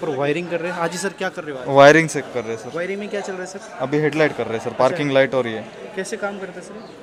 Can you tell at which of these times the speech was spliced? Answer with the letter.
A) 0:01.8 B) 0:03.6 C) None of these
C